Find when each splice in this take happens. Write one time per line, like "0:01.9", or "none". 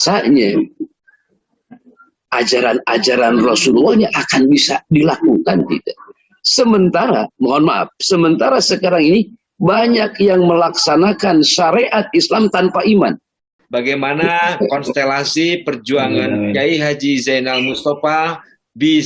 0:13.5